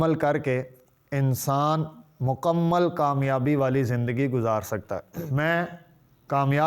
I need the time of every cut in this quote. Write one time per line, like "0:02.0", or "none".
0:05.3